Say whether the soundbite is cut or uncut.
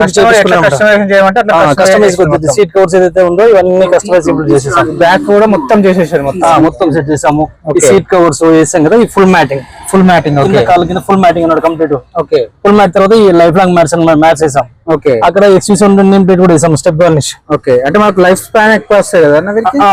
uncut